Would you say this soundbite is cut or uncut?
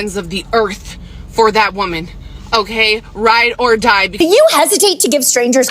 cut